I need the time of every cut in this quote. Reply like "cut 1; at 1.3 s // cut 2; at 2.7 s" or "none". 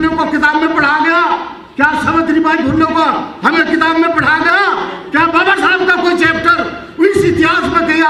none